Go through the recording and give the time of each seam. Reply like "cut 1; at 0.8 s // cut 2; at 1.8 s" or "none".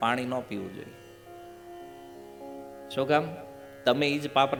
none